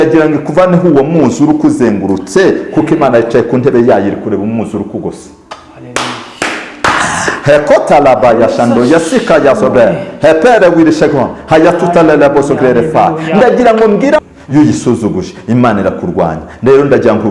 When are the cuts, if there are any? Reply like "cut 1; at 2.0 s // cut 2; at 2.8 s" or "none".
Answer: cut 1; at 14.2 s